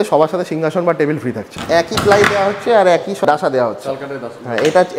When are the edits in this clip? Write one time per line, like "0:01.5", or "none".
0:01.5
0:03.2

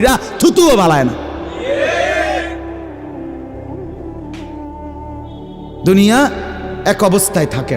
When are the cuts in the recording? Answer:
0:02.9
0:05.5

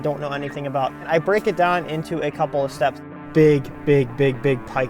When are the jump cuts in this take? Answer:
0:01.1
0:03.0

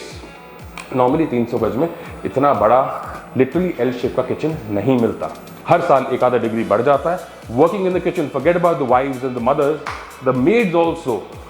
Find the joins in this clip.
0:05.5

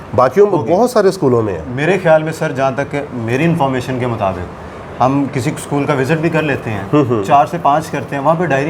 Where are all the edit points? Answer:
none

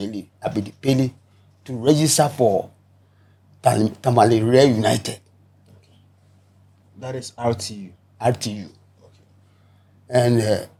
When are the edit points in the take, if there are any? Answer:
none

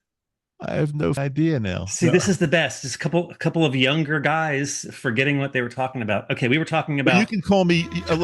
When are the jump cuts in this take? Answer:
0:01.2

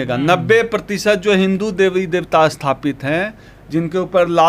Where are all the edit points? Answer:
none

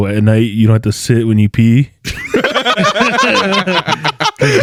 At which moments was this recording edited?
none

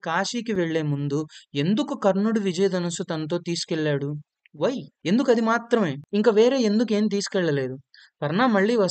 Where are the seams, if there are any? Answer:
0:04.9
0:06.0

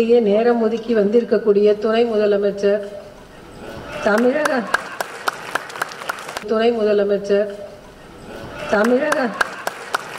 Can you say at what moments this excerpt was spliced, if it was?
0:06.4

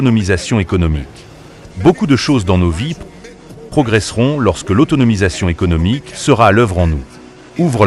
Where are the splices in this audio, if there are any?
none

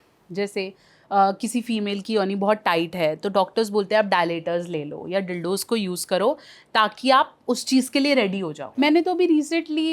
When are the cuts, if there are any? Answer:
0:08.6

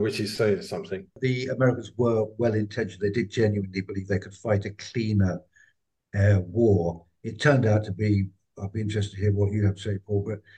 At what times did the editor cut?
0:01.1

